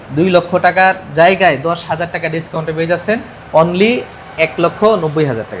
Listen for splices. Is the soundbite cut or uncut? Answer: uncut